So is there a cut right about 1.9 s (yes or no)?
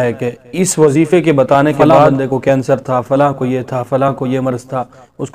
yes